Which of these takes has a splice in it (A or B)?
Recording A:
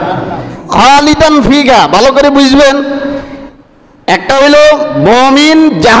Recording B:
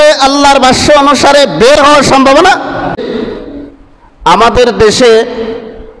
B